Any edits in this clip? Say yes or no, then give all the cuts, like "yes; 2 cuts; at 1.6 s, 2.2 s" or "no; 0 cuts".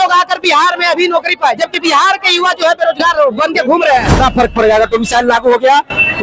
yes; 1 cut; at 4.2 s